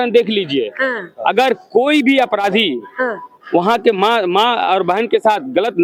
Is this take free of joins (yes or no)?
yes